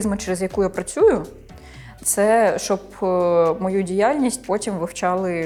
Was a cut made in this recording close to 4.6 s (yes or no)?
no